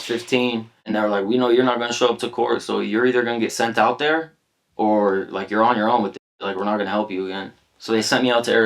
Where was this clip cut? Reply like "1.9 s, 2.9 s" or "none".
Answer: 0.9 s

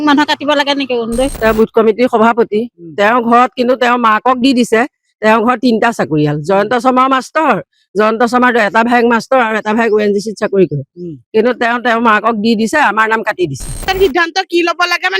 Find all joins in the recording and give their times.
1.3 s, 13.8 s

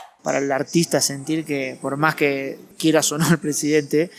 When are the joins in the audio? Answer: 2.6 s

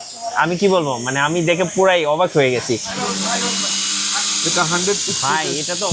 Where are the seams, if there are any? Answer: 2.9 s

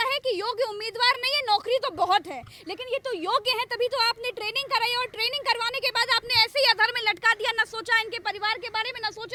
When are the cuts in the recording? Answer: none

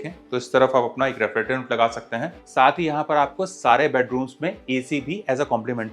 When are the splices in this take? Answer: 2.4 s

